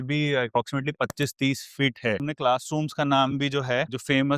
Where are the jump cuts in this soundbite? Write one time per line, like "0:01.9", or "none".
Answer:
0:02.2